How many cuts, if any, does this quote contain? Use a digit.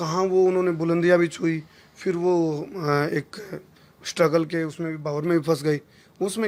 0